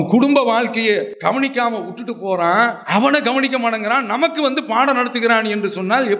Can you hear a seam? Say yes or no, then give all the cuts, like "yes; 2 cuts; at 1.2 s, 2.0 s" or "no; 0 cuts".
yes; 2 cuts; at 1.1 s, 2.8 s